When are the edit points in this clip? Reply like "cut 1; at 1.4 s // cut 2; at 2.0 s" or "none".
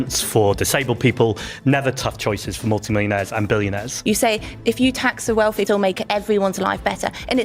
cut 1; at 3.9 s // cut 2; at 5.7 s